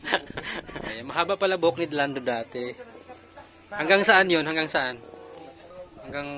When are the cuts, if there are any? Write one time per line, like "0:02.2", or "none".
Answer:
0:00.9